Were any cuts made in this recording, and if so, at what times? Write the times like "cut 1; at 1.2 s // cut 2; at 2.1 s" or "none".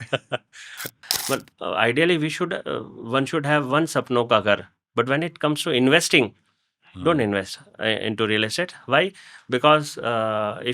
cut 1; at 1.0 s